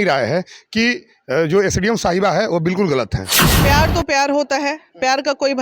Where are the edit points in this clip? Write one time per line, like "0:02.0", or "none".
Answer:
0:03.6